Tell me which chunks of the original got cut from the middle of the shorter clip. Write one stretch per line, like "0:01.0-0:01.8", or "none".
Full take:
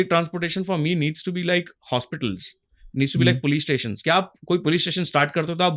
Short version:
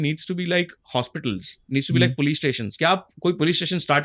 0:02.5-0:02.8